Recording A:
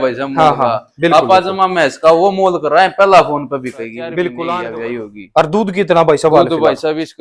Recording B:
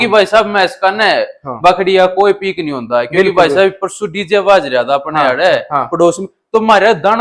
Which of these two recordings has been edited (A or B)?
A